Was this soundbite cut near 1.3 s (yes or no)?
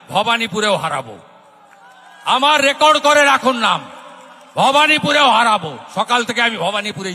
no